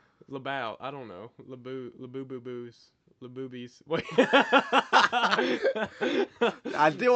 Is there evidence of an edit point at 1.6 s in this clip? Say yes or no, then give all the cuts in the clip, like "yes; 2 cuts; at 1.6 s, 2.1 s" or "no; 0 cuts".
no; 0 cuts